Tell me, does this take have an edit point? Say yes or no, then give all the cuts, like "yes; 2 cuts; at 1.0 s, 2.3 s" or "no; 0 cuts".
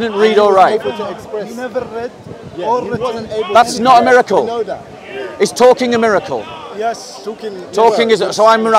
no; 0 cuts